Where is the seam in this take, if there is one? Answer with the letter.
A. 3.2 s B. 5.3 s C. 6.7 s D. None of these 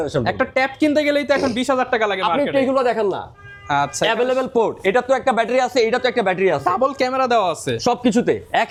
D